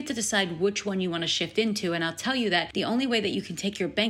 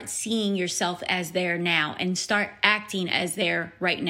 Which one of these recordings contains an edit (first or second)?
first